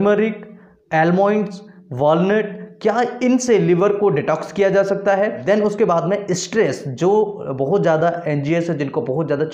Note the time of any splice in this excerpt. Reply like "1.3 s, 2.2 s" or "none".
5.4 s